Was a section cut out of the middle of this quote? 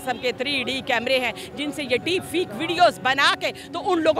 no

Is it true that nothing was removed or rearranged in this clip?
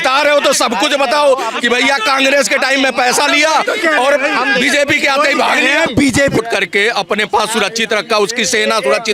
no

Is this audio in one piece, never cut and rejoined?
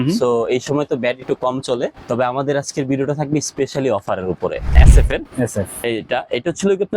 no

